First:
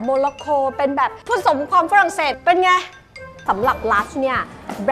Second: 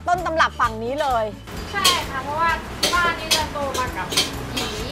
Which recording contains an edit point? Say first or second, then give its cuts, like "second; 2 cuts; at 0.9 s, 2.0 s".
first; 2 cuts; at 2.3 s, 3.4 s